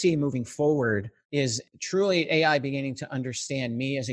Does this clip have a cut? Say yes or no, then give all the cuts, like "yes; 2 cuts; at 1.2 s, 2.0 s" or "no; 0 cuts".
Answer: yes; 1 cut; at 1.4 s